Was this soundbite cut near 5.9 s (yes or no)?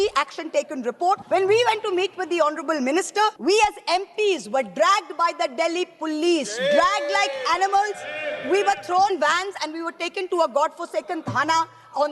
no